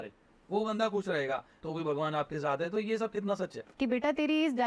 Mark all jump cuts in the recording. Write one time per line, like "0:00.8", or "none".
0:01.6
0:03.6